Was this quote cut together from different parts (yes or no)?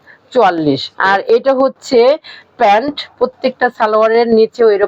yes